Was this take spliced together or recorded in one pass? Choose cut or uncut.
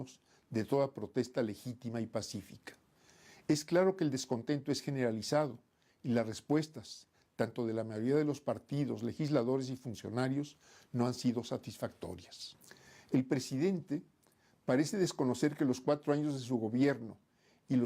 cut